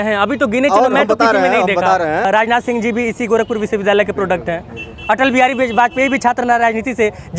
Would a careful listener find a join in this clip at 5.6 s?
no; 1 cut; at 2.3 s

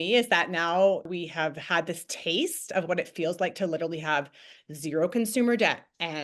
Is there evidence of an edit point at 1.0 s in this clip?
yes; 1 cut; at 1.0 s

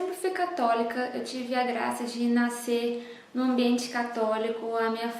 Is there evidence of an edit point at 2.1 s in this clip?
yes; 1 cut; at 2.1 s

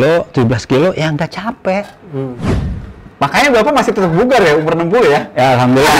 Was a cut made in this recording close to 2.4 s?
yes; 1 cut; at 2.4 s

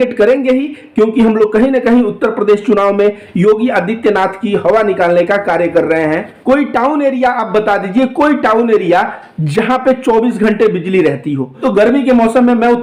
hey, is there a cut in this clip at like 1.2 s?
no; 2 cuts; at 6.3 s, 11.6 s

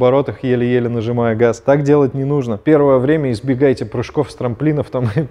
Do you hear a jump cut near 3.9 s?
no; 2 cuts; at 1.6 s, 2.5 s

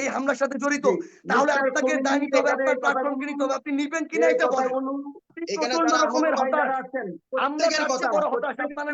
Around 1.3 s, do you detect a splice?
no; 1 cut; at 5.4 s

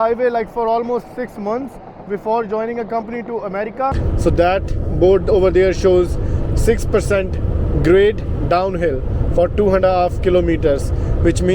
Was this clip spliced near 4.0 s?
yes; 1 cut; at 4.0 s

